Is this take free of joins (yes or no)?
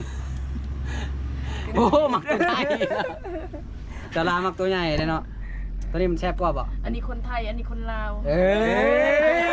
yes